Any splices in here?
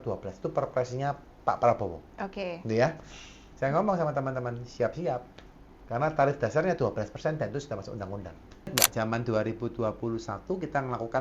yes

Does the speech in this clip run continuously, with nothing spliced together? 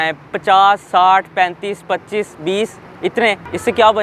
yes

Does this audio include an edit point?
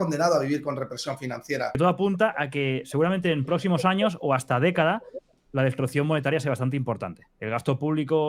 yes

